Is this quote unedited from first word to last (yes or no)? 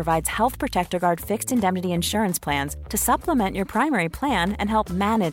yes